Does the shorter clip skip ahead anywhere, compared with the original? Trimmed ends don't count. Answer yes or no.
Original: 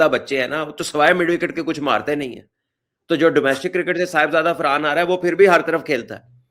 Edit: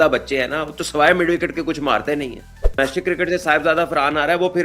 yes